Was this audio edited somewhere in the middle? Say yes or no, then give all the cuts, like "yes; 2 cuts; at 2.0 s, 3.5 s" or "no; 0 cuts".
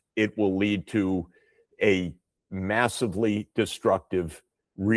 no; 0 cuts